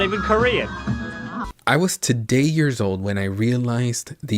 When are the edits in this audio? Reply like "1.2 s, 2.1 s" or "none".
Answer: 1.4 s

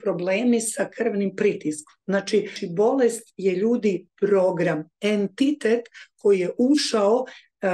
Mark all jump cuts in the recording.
2.6 s

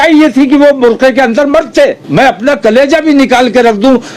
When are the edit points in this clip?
2.0 s

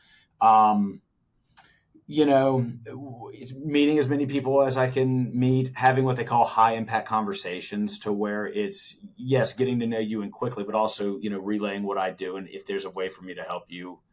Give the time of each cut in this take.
none

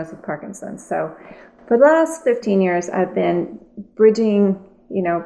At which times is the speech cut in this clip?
none

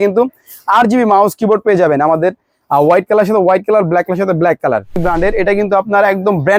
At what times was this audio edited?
5.2 s

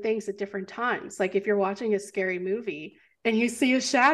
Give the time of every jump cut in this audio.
none

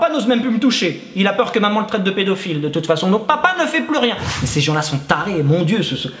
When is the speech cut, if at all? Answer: 4.3 s

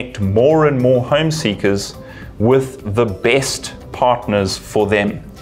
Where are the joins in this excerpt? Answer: none

